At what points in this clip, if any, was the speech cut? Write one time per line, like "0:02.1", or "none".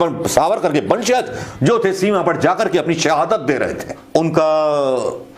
0:03.9